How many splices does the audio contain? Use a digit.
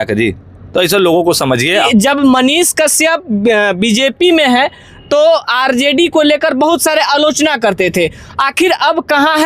1